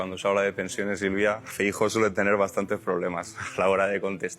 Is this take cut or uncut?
cut